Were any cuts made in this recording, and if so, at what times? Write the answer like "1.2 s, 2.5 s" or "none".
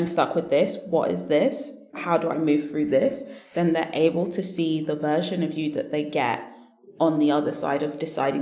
2.0 s